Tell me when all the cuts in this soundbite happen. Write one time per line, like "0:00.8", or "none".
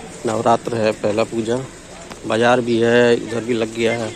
none